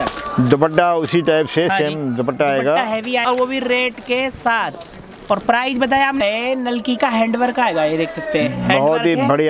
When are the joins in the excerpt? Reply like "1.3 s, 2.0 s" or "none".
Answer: 3.2 s, 6.2 s